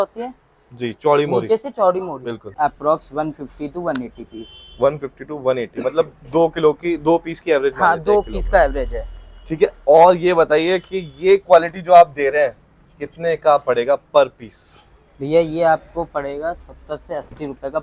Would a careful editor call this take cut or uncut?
cut